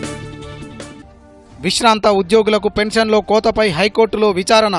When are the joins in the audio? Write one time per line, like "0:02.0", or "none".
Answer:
none